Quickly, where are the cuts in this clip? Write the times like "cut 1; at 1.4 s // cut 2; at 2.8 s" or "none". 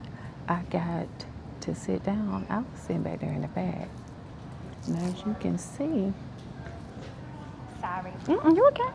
none